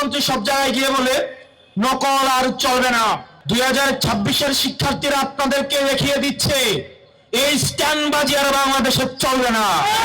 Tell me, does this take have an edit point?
yes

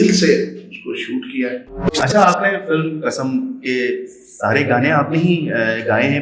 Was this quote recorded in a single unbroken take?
no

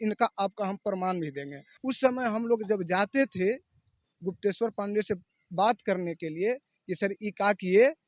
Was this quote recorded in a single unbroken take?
no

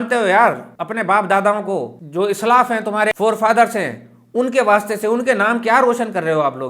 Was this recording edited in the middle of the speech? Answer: no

